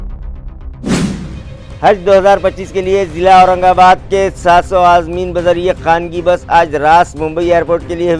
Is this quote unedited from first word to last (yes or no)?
no